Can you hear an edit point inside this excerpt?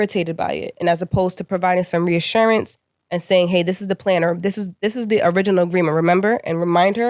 no; 0 cuts

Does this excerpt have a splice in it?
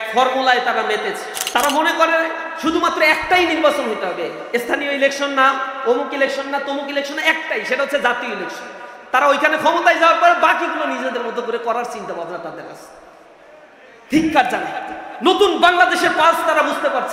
yes; 1 cut; at 1.3 s

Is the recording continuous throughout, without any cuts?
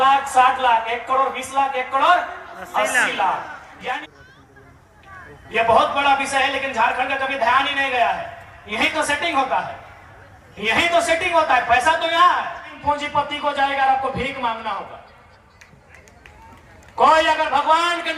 no; 2 cuts; at 4.0 s, 12.7 s

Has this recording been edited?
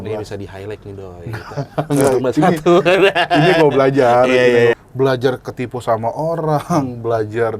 yes; 1 cut; at 4.8 s

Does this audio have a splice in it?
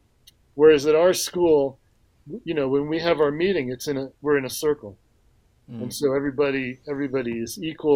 yes; 1 cut; at 2.1 s

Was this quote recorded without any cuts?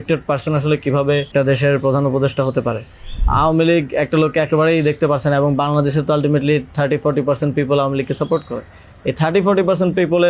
no; 2 cuts; at 1.3 s, 3.2 s

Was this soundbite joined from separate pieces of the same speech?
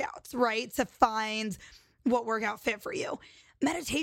no; 0 cuts

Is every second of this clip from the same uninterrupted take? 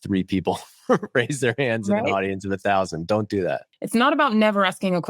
no; 1 cut; at 3.7 s

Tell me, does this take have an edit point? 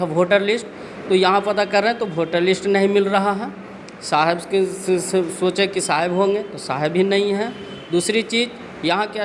no; 0 cuts

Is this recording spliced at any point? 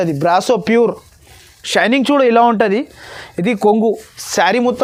no; 0 cuts

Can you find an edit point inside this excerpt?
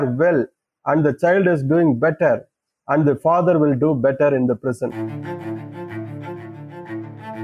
yes; 1 cut; at 5.1 s

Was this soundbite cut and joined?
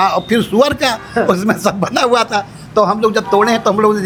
no; 0 cuts

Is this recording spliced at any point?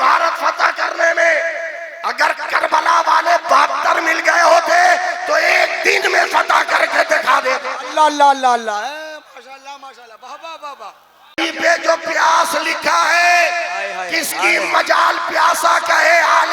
yes; 1 cut; at 11.4 s

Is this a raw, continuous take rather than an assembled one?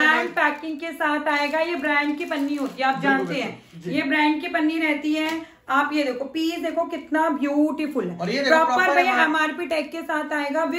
yes; 0 cuts

